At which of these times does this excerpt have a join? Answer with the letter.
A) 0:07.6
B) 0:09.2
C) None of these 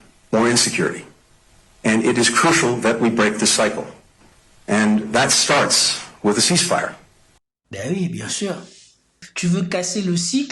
B